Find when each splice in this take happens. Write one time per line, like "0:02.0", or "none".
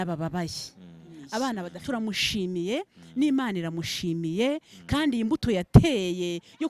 0:01.7